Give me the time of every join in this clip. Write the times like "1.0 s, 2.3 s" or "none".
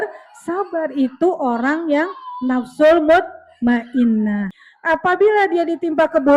4.6 s